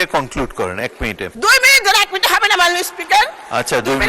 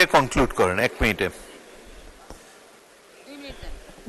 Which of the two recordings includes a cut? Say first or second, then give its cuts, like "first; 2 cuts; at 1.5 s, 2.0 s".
first; 1 cut; at 1.3 s